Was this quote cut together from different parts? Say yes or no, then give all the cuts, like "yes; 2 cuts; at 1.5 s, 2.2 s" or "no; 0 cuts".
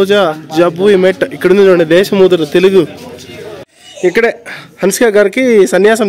yes; 1 cut; at 3.6 s